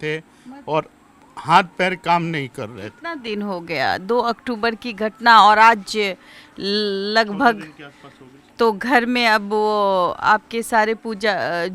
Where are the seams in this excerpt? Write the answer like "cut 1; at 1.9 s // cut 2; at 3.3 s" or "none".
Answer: none